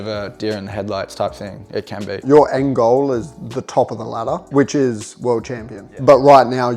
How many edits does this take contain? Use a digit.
3